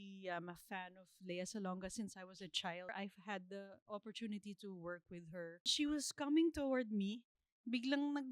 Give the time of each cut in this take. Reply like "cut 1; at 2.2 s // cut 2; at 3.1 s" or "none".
cut 1; at 2.9 s // cut 2; at 5.7 s